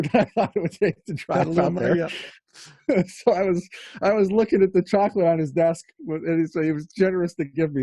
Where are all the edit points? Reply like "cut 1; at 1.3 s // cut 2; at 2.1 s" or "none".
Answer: none